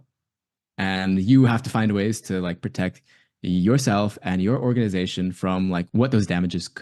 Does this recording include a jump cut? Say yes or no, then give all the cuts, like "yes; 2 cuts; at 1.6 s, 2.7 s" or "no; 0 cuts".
yes; 1 cut; at 5.9 s